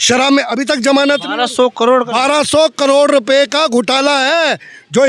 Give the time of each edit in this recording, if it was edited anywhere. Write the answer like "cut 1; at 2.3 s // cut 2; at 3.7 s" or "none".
none